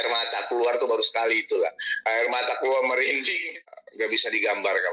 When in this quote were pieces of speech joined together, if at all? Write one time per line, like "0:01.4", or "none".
0:03.9